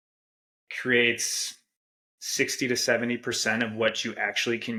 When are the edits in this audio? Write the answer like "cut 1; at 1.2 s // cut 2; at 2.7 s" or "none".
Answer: none